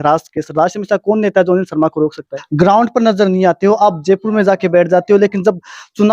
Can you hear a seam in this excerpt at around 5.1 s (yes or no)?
no